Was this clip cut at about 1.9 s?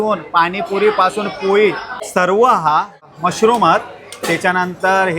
yes; 2 cuts; at 1.9 s, 3.1 s

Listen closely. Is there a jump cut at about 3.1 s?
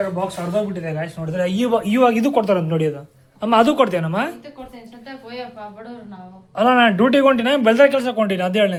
no; 0 cuts

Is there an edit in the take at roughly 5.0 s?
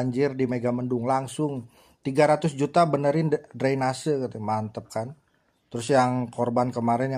no; 0 cuts

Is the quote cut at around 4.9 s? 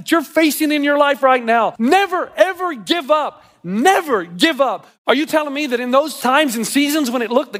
yes; 3 cuts; at 1.7 s, 4.9 s, 6.2 s

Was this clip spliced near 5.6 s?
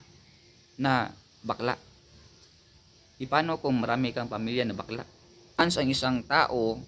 yes; 1 cut; at 5.6 s

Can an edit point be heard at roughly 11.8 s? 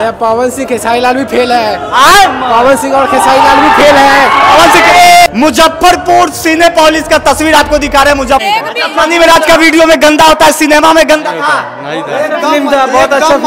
no; 2 cuts; at 5.3 s, 8.4 s

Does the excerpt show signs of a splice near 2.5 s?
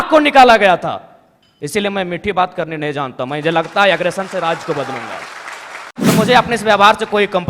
no; 1 cut; at 5.9 s

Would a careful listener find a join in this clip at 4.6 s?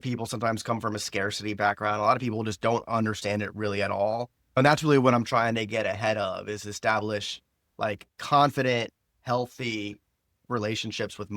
yes; 2 cuts; at 4.6 s, 10.4 s

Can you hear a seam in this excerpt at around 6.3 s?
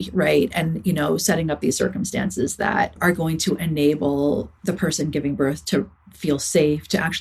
no; 2 cuts; at 3.0 s, 4.5 s

